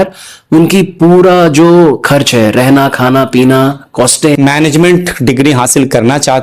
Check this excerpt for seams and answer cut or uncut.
cut